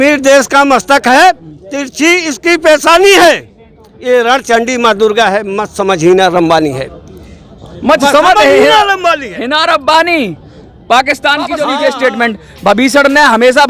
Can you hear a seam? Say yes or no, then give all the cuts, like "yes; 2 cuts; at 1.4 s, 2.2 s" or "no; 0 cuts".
yes; 1 cut; at 11.6 s